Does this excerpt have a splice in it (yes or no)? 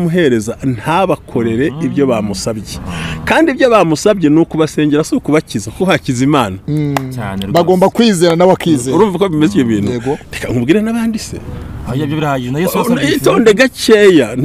no